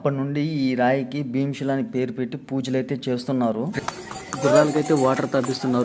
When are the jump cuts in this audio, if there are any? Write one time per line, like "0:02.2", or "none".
0:03.7